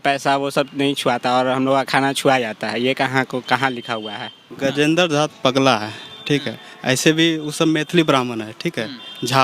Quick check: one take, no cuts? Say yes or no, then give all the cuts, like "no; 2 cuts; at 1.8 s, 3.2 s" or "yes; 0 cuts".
no; 1 cut; at 4.4 s